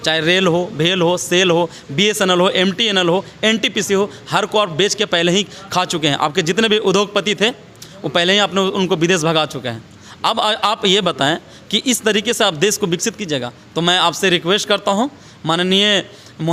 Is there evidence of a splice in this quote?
no; 0 cuts

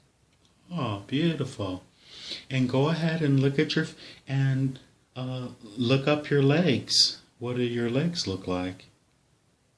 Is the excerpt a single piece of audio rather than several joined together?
yes; 0 cuts

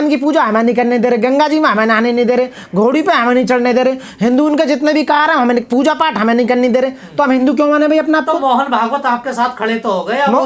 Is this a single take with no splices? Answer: yes; 0 cuts

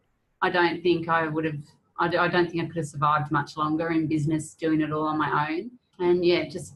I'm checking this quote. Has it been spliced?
yes; 1 cut; at 5.8 s

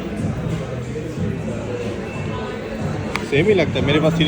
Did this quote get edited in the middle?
no; 0 cuts

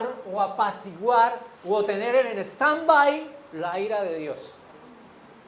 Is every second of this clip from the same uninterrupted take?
yes; 0 cuts

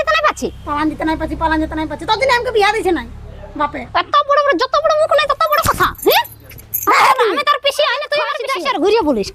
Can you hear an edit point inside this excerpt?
yes; 1 cut; at 8.4 s

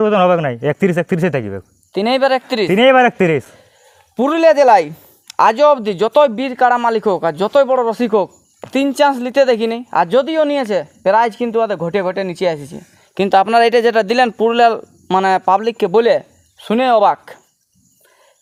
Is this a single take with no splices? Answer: yes; 0 cuts

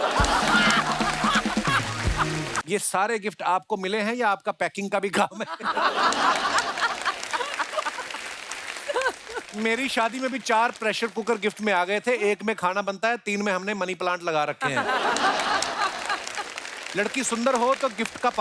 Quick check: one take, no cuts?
no; 1 cut; at 2.6 s

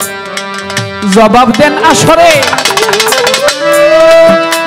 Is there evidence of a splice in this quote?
no; 0 cuts

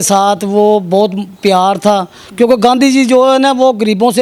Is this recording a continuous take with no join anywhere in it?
yes; 0 cuts

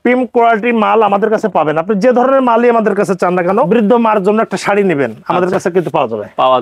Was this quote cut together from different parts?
yes; 1 cut; at 3.7 s

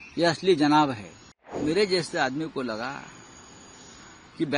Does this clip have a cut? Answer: yes; 1 cut; at 1.5 s

